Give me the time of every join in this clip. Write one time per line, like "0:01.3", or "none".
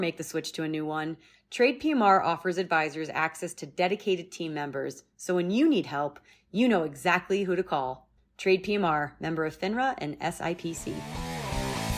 0:11.0